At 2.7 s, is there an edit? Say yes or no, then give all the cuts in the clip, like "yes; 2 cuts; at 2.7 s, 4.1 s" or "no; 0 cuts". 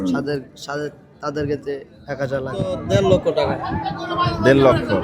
yes; 1 cut; at 2.7 s